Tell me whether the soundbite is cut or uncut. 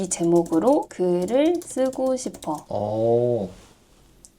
cut